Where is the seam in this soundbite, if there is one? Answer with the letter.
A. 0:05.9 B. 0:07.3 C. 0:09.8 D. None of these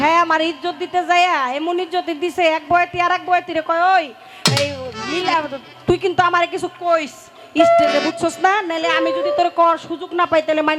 D